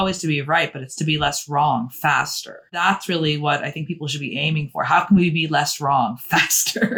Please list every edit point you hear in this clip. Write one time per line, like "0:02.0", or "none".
0:02.8